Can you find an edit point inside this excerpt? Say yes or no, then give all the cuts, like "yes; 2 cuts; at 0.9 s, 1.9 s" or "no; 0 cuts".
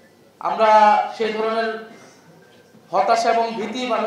no; 0 cuts